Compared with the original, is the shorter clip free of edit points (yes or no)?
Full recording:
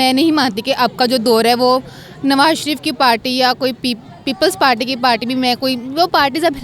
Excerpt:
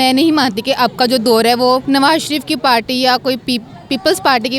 no